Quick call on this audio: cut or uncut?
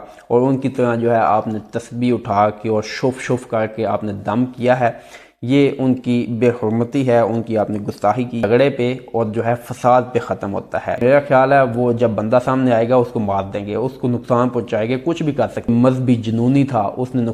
cut